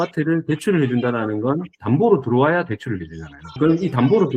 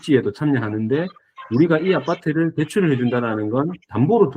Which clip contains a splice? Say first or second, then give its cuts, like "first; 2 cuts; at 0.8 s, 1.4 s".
first; 1 cut; at 3.4 s